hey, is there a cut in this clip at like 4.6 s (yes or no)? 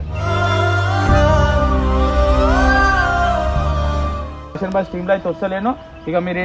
yes